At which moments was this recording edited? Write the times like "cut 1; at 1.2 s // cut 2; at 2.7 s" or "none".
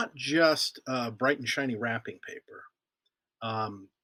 none